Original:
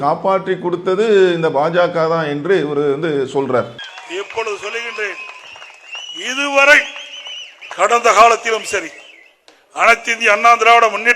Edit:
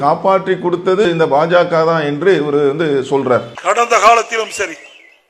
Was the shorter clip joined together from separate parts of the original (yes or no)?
yes